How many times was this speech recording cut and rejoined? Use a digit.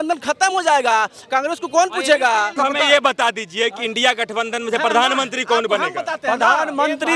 1